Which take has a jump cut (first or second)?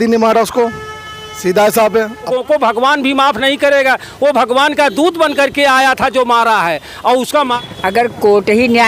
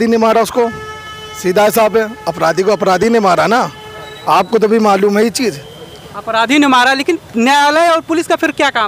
first